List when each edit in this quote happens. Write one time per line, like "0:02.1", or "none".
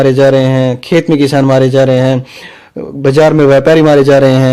none